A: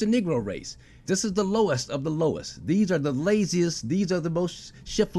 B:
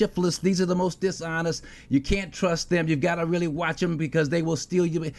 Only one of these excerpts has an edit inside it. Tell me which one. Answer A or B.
A